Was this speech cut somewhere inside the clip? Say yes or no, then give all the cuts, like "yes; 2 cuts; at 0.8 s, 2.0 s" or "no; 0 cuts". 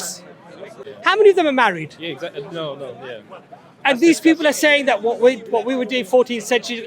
yes; 1 cut; at 0.9 s